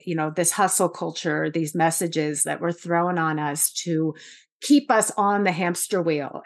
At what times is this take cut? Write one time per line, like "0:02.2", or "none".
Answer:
none